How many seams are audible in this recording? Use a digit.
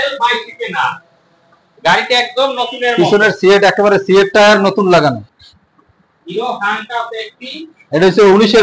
1